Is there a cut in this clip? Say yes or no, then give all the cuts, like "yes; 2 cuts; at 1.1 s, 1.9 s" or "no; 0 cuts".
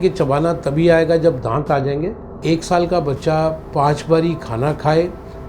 yes; 1 cut; at 2.4 s